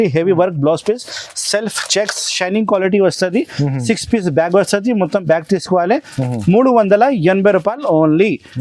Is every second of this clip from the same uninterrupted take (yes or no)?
yes